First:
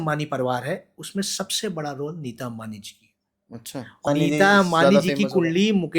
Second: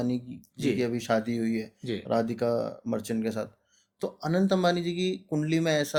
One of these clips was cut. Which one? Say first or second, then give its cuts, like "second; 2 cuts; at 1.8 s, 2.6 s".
first; 1 cut; at 4.1 s